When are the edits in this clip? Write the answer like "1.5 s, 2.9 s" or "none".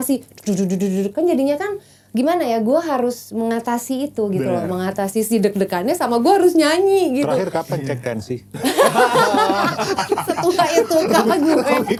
none